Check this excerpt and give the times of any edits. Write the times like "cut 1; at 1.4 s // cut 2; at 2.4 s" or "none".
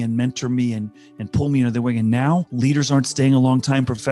cut 1; at 2.5 s